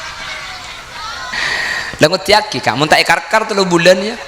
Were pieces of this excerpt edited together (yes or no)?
yes